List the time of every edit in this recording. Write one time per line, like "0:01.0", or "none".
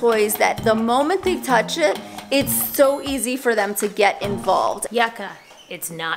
0:04.9